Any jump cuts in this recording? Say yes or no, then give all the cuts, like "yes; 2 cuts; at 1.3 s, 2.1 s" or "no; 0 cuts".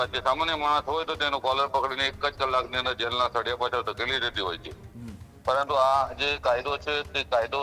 no; 0 cuts